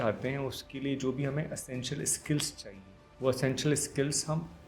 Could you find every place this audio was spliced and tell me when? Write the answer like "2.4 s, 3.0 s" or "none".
2.5 s